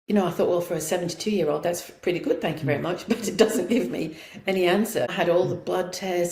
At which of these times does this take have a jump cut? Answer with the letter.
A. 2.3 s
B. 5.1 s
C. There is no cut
B